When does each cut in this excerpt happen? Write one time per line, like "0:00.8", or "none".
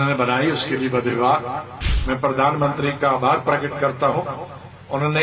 0:01.9

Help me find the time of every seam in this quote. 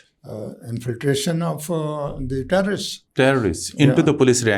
none

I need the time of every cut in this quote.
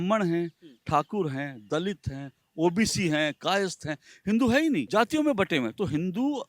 0:04.9

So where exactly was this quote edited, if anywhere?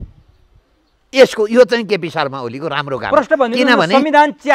none

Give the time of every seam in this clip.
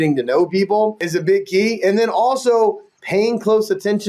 0:01.0

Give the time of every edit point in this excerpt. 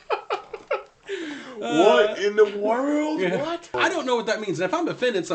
0:03.8

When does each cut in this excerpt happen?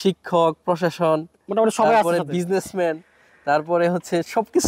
none

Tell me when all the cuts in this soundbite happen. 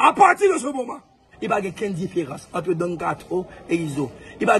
0:01.3

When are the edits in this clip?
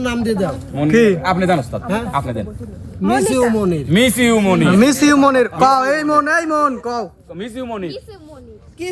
none

